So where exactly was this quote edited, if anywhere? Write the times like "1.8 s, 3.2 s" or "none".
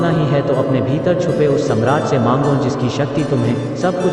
none